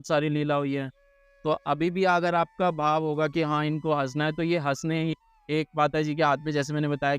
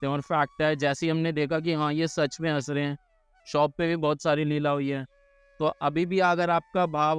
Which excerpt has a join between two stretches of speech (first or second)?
first